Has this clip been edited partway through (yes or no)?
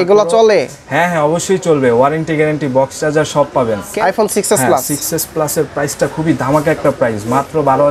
yes